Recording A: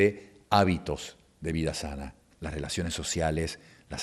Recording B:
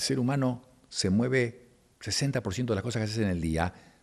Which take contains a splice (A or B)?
A